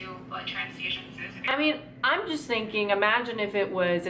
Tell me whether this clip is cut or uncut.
cut